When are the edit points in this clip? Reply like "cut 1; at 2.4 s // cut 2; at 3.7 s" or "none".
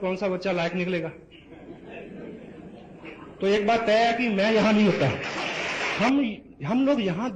cut 1; at 5.9 s